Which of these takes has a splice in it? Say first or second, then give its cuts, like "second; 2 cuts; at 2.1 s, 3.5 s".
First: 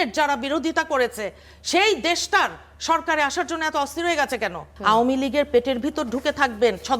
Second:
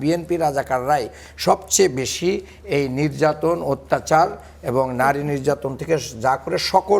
first; 1 cut; at 4.7 s